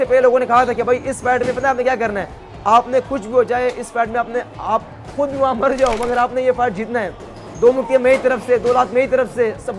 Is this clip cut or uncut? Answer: uncut